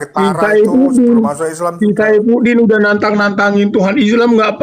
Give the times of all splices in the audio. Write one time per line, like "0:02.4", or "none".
none